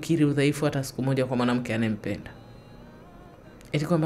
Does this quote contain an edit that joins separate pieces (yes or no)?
no